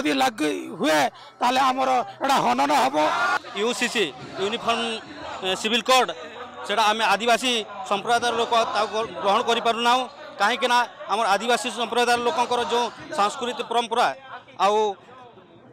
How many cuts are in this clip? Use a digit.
1